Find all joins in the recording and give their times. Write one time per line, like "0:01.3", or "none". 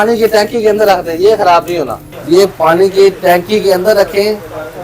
0:02.1